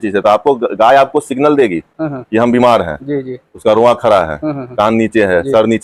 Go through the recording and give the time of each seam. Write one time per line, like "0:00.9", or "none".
none

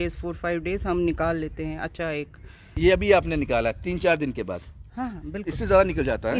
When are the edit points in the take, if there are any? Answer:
0:02.7

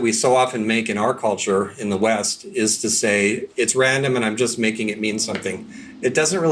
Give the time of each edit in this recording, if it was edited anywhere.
0:03.5

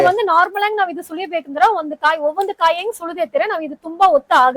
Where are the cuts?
none

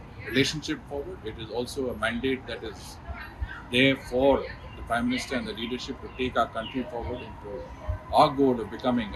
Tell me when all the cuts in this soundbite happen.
none

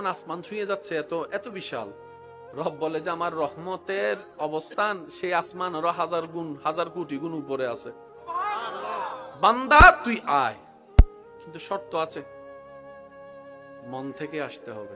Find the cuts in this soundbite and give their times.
0:12.3
0:13.9

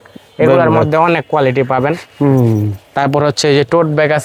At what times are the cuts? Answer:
none

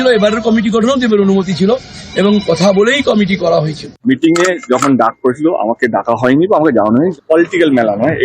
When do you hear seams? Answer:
0:04.0
0:07.2

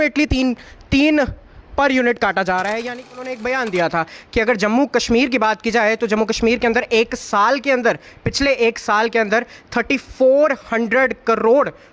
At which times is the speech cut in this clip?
0:03.4

